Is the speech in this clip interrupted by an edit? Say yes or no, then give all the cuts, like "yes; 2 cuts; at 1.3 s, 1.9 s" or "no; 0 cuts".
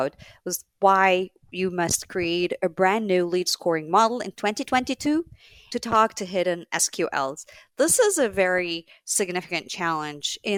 no; 0 cuts